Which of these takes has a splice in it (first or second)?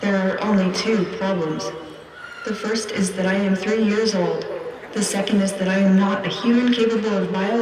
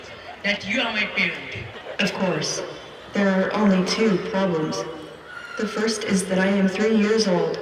second